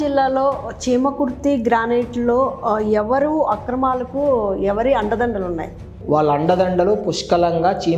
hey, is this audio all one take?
no; 1 cut; at 5.9 s

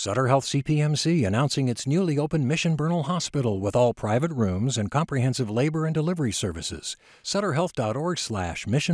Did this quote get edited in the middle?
no; 0 cuts

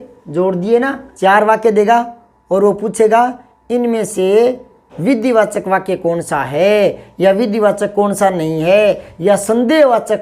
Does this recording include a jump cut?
yes; 1 cut; at 1.0 s

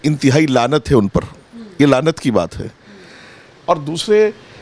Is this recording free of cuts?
yes; 0 cuts

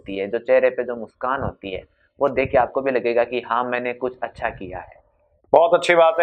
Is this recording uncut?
yes; 0 cuts

